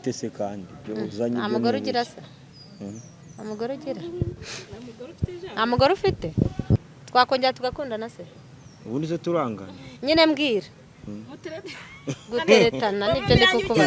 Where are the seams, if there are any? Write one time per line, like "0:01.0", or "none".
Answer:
0:07.0